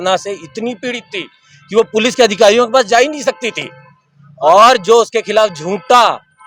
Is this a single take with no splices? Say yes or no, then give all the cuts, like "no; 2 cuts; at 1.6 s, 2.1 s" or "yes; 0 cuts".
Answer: yes; 0 cuts